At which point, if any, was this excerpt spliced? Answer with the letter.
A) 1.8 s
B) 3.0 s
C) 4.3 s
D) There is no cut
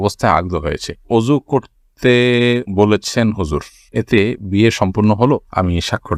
D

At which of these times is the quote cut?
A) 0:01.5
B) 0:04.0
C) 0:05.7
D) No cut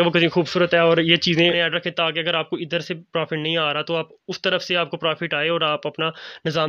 A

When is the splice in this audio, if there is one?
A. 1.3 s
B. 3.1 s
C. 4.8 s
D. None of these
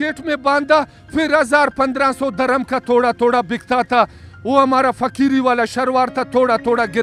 D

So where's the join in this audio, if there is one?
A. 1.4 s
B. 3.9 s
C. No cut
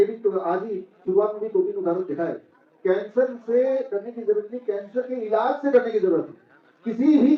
C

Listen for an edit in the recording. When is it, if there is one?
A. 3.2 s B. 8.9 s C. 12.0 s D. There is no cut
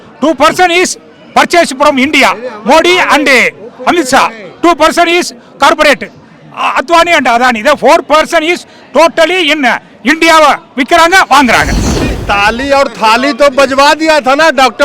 C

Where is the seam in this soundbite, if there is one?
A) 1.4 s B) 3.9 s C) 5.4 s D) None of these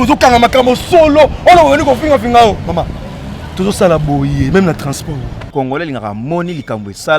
C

